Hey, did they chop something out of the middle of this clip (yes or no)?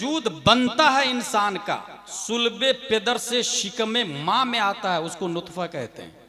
no